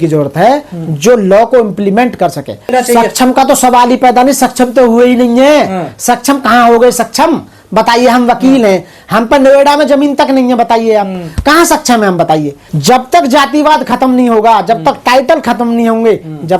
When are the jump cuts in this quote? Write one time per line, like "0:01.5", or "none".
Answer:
0:02.7
0:12.5